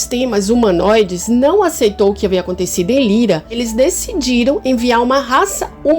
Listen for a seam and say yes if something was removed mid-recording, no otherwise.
yes